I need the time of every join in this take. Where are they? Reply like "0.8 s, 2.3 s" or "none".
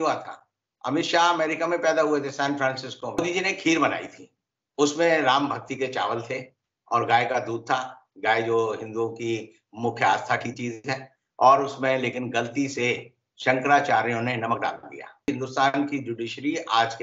3.2 s, 15.3 s